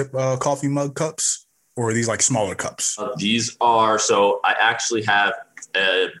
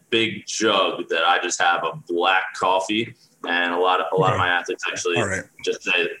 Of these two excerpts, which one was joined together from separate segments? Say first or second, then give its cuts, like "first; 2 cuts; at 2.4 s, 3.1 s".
first; 1 cut; at 3.1 s